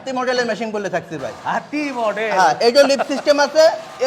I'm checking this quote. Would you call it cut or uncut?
uncut